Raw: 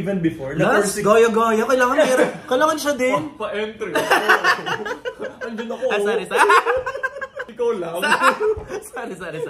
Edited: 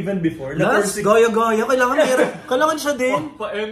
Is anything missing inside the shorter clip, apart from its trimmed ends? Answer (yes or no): no